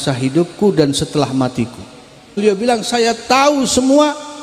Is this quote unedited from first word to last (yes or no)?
no